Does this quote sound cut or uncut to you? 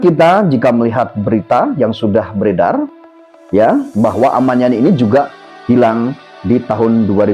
uncut